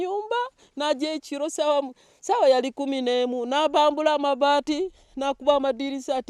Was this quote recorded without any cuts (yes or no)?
yes